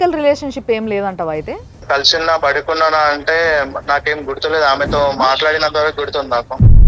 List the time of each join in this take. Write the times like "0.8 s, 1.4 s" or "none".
1.8 s